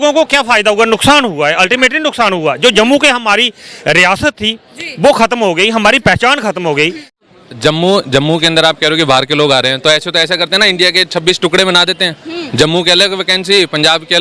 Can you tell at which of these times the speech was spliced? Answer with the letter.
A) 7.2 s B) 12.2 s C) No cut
A